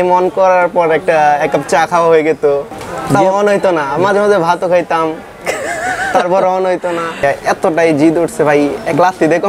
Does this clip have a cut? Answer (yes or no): yes